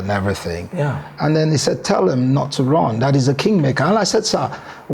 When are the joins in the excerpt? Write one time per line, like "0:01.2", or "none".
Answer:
none